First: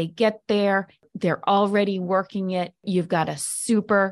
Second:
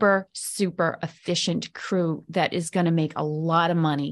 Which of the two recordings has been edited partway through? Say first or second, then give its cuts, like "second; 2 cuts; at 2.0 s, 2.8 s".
first; 2 cuts; at 1.0 s, 2.8 s